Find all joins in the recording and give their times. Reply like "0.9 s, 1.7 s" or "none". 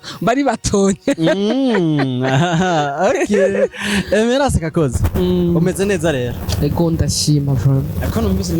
none